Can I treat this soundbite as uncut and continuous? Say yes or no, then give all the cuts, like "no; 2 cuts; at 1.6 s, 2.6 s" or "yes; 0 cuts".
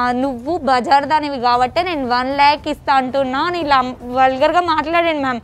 yes; 0 cuts